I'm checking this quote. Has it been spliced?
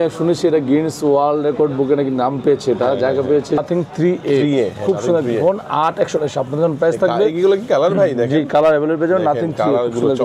yes; 1 cut; at 3.6 s

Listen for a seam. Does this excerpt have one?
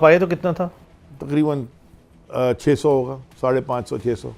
no; 0 cuts

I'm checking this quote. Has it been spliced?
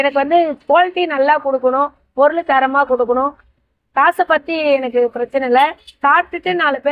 no; 0 cuts

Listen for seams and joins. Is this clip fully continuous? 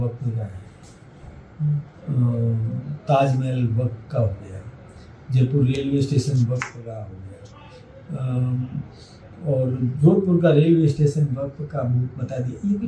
yes; 0 cuts

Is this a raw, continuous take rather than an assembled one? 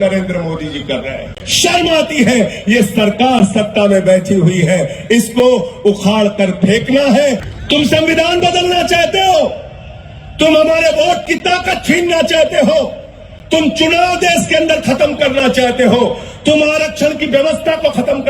no; 2 cuts; at 1.4 s, 7.5 s

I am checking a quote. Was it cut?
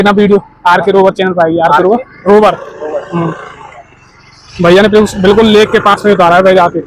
no; 0 cuts

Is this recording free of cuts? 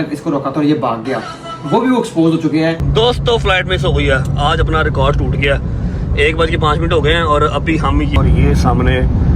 no; 2 cuts; at 2.8 s, 8.2 s

